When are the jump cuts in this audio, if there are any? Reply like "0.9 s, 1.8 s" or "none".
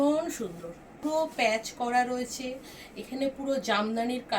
1.0 s